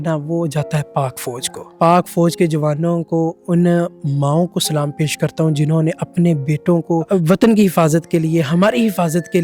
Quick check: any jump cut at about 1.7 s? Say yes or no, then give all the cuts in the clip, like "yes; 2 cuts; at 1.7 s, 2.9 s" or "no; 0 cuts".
yes; 2 cuts; at 1.7 s, 7.1 s